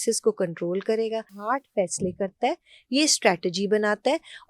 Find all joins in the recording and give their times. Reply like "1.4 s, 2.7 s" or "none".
1.4 s

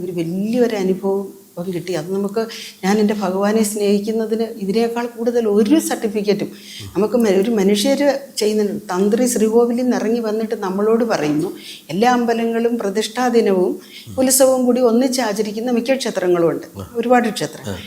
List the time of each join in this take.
none

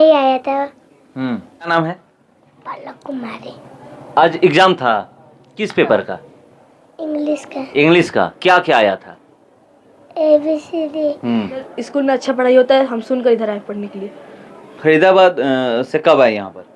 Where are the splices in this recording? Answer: 1.7 s, 11.8 s

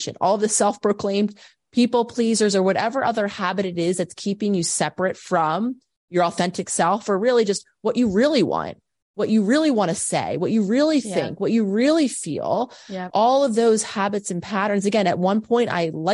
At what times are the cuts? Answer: none

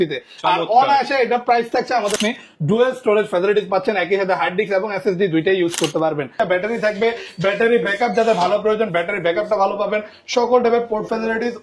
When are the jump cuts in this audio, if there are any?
2.2 s, 6.3 s

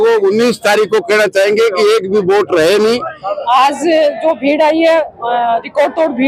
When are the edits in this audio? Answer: 3.4 s

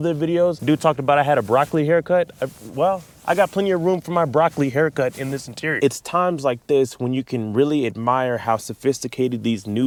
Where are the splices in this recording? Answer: none

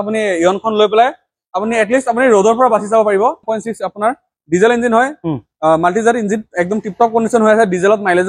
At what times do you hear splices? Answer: 3.4 s

